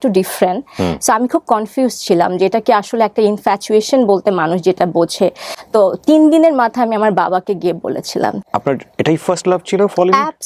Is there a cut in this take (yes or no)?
yes